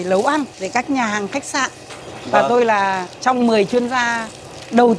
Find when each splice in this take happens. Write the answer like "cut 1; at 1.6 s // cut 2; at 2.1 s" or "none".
none